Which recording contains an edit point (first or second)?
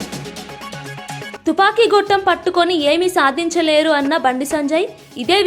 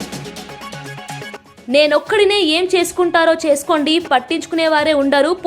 second